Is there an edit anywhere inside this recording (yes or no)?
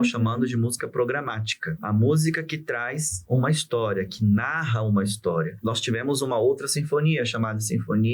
yes